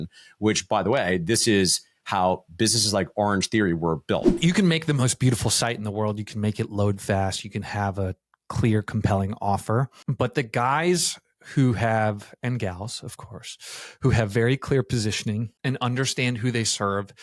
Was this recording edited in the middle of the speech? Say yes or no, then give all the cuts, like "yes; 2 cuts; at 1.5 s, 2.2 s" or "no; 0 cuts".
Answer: yes; 3 cuts; at 4.3 s, 10.0 s, 15.5 s